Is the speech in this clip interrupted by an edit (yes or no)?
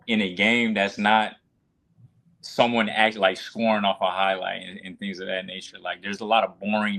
no